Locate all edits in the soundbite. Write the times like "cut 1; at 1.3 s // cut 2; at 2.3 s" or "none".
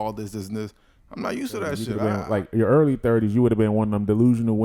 cut 1; at 1.9 s